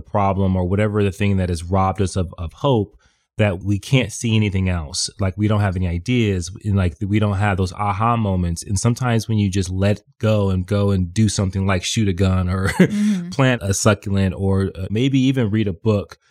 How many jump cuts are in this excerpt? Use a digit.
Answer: 1